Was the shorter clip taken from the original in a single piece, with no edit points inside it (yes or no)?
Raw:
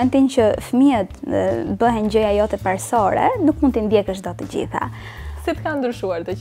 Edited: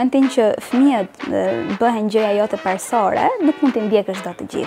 yes